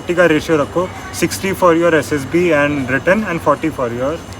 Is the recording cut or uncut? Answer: uncut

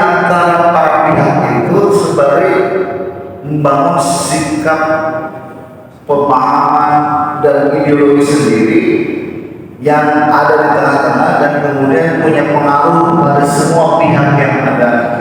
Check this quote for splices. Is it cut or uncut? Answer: uncut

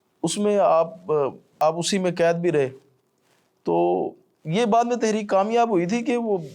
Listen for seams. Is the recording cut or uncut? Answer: cut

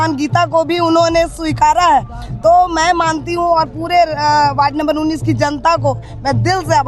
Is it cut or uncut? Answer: uncut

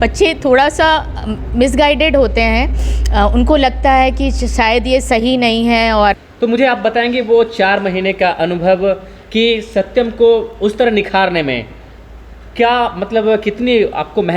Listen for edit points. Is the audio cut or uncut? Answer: cut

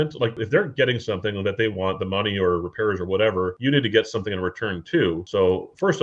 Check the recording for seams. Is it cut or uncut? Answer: uncut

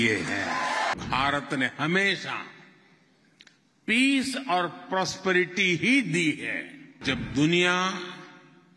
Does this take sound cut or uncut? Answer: cut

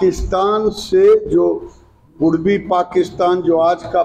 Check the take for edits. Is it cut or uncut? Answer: uncut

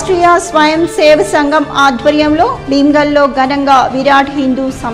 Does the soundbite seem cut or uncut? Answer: uncut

